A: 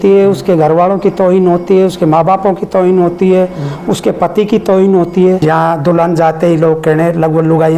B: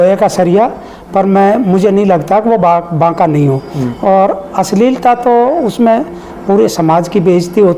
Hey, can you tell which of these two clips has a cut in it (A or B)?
A